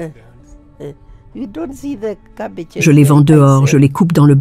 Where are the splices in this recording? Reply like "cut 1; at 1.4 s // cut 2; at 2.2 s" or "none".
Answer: cut 1; at 2.8 s